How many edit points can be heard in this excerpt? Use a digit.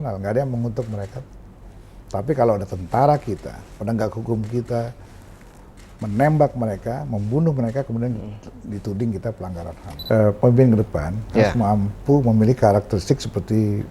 1